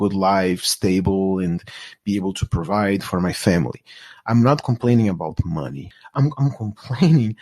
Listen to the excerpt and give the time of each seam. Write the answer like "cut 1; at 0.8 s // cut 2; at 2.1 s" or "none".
cut 1; at 6.1 s